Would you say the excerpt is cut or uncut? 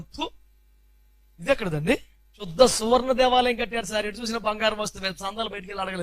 cut